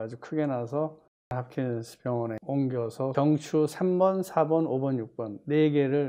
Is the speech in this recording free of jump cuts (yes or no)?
no